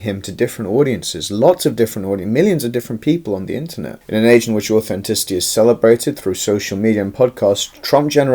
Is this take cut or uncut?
uncut